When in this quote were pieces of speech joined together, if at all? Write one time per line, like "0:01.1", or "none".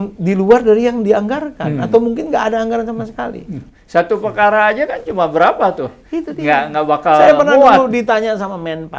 none